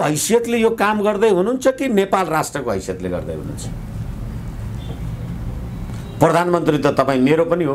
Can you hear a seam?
no; 0 cuts

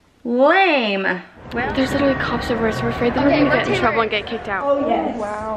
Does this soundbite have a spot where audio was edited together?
yes; 2 cuts; at 1.5 s, 4.6 s

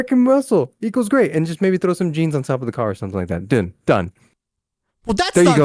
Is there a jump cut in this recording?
no; 0 cuts

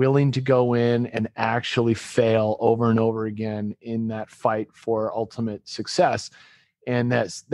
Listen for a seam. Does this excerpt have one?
no; 0 cuts

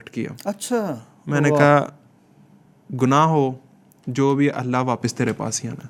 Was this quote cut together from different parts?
no; 0 cuts

